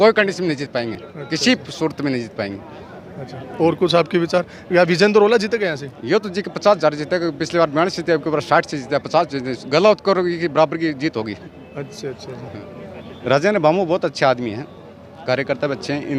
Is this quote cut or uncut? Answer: uncut